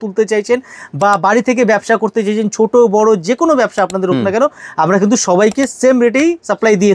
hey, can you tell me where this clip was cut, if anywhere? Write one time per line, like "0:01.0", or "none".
none

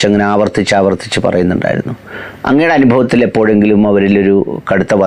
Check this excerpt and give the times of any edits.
none

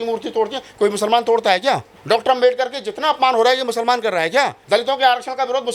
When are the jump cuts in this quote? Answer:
0:01.9
0:04.6

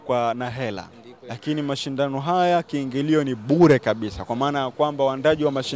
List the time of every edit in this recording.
none

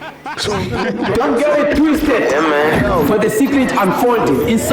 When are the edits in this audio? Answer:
0:00.9

